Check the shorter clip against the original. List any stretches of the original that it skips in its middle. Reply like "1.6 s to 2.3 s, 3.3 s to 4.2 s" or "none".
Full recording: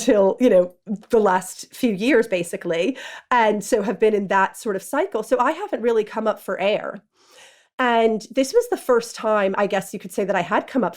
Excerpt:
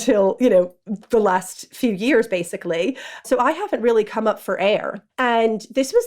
3.2 s to 5.2 s, 7.0 s to 7.6 s